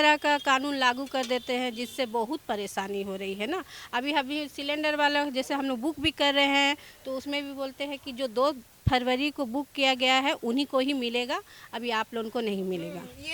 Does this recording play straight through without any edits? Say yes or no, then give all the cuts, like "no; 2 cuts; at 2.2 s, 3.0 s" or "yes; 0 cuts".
yes; 0 cuts